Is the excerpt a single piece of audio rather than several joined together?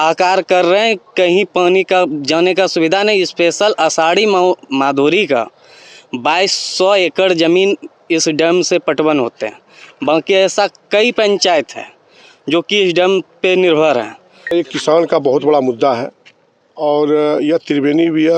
no; 1 cut; at 14.5 s

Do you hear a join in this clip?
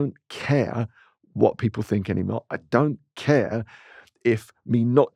no; 0 cuts

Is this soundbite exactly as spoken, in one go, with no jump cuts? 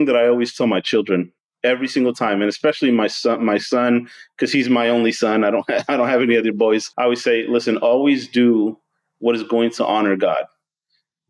no; 2 cuts; at 1.4 s, 6.9 s

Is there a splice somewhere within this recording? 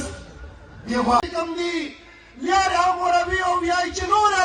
yes; 1 cut; at 1.2 s

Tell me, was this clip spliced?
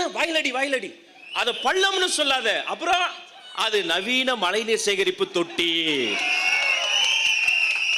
no; 0 cuts

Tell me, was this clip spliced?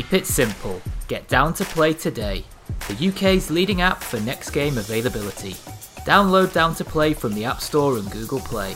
no; 0 cuts

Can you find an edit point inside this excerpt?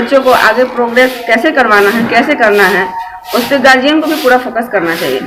no; 0 cuts

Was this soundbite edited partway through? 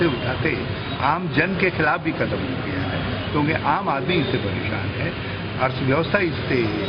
no; 0 cuts

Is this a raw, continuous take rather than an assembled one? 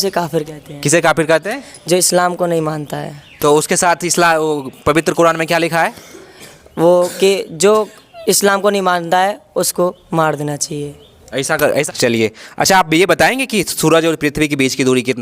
no; 1 cut; at 11.8 s

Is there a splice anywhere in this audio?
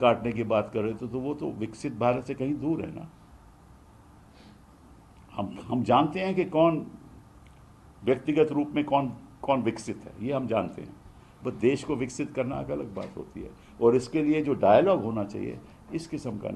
no; 0 cuts

